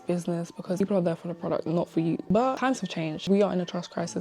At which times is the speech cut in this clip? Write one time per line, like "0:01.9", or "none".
0:00.8
0:02.3
0:03.2